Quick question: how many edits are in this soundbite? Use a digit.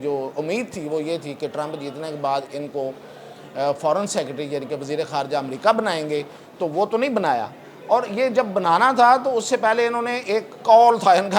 0